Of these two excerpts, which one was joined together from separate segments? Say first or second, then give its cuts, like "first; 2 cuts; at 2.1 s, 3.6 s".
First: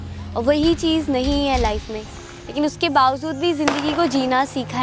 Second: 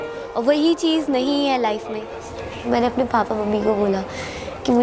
second; 1 cut; at 2.4 s